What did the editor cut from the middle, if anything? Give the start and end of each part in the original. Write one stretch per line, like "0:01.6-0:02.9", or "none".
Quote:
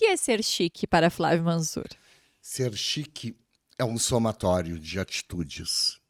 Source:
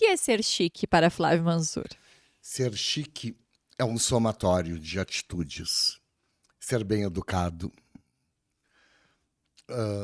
none

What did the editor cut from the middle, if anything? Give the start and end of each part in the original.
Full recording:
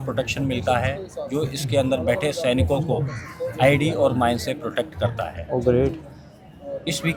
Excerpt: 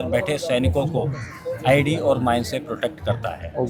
none

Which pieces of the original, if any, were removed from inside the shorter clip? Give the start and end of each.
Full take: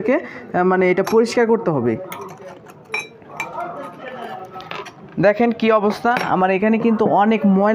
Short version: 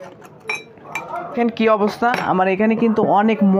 0:03.8-0:05.4

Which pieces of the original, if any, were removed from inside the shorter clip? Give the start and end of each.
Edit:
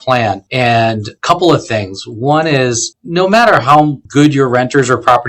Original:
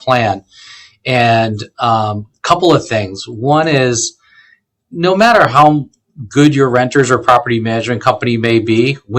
0:01.0-0:02.2
0:04.1-0:04.8
0:05.9-0:06.2

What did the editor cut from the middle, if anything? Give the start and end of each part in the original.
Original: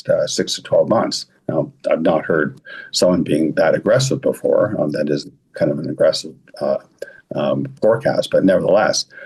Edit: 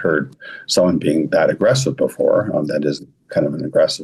none

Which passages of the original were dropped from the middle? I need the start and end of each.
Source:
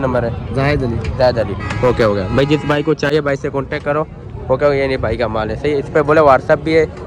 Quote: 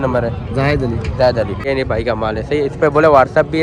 0:01.7-0:04.8

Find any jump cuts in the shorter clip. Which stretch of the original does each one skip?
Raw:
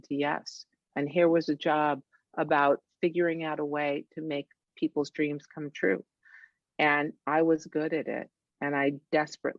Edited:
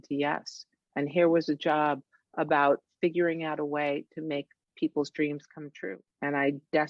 0:05.8-0:08.2

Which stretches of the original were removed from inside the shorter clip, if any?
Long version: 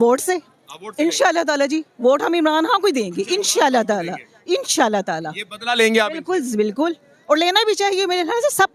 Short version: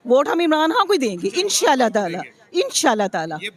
none

